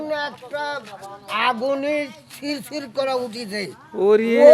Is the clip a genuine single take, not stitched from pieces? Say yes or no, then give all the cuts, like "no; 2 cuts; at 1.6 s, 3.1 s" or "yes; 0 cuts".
yes; 0 cuts